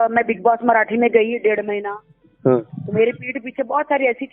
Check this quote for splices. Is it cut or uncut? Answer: uncut